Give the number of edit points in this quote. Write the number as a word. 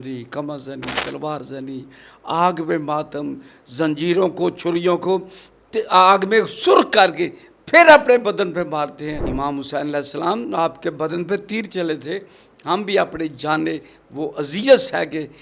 one